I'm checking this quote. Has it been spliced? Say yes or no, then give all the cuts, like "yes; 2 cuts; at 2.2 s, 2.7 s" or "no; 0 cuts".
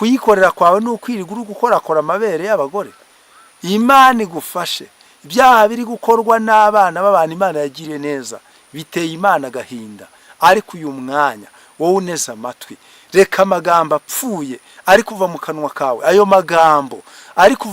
no; 0 cuts